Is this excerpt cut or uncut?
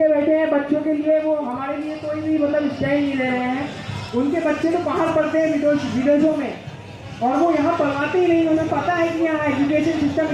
uncut